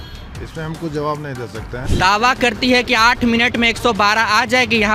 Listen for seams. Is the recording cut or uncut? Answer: cut